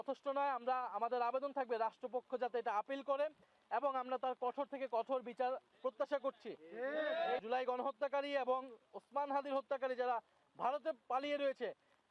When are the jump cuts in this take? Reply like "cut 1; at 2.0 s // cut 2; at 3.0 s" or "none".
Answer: cut 1; at 7.4 s